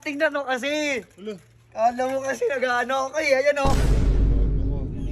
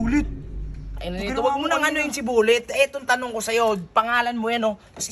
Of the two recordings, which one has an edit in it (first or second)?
first